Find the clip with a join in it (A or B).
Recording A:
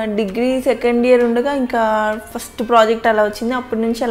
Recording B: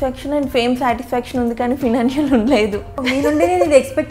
B